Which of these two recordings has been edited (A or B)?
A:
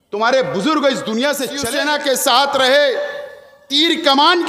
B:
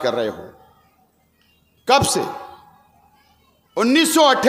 A